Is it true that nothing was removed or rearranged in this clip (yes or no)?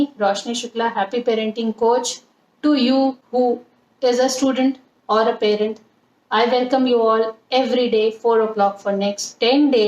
no